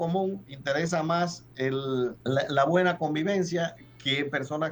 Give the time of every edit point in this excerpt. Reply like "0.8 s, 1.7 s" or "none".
2.2 s